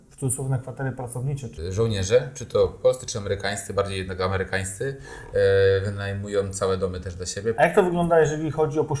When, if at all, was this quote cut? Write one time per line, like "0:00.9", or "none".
0:01.6
0:07.6